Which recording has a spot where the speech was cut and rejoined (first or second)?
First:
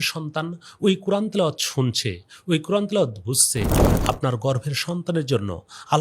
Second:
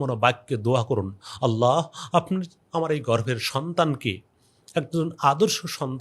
first